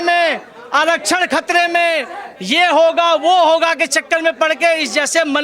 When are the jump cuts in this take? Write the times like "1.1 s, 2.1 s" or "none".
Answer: none